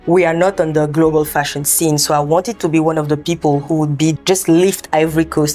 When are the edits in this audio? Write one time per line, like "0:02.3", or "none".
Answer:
0:04.2